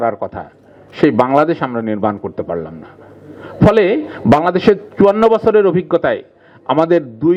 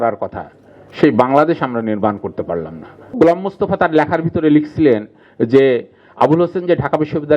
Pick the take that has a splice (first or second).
second